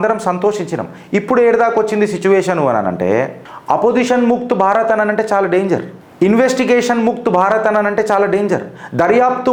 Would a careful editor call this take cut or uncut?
uncut